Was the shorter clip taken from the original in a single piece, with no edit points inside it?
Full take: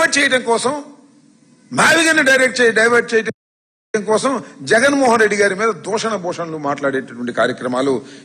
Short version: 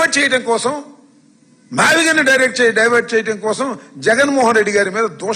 no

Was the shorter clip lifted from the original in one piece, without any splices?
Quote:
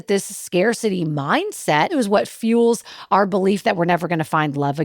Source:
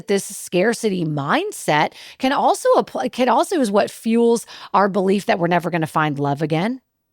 no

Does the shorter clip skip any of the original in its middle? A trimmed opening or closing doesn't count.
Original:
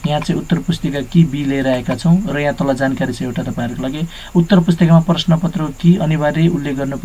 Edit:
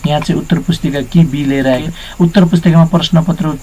yes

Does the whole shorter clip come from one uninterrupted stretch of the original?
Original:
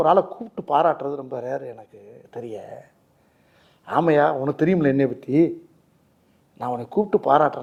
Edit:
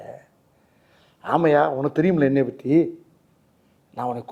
yes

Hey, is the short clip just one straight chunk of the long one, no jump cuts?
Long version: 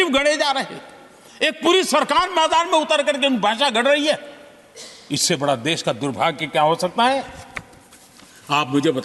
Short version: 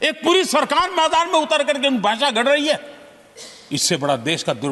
yes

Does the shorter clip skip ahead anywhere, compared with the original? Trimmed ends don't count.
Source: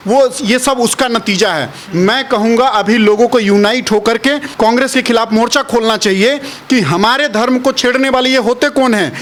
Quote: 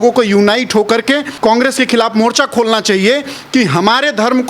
no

